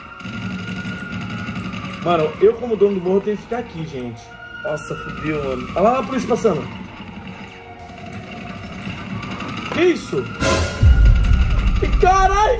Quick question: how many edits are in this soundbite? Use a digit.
0